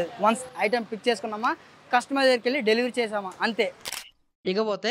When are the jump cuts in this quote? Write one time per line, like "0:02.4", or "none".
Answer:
0:03.9